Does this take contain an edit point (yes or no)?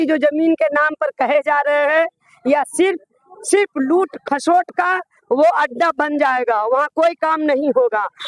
no